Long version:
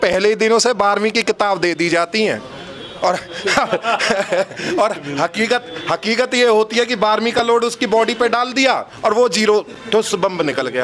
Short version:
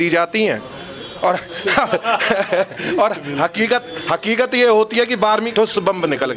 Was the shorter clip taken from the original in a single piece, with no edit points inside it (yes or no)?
no